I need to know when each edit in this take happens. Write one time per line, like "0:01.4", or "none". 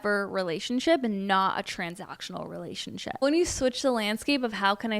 0:03.2